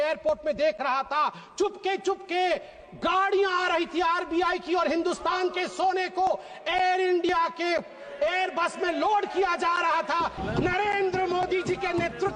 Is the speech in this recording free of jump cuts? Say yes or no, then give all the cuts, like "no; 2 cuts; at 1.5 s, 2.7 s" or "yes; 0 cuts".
no; 1 cut; at 10.4 s